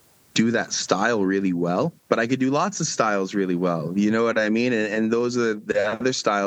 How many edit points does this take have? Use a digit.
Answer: 1